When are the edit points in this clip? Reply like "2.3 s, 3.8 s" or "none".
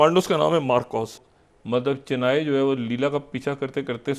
1.2 s